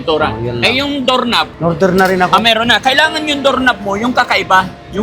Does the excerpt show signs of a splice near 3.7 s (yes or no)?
no